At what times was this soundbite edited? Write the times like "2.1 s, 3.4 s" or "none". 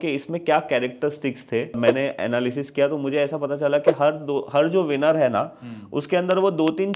1.8 s